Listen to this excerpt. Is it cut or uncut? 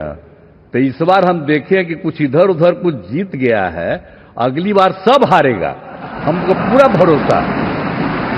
uncut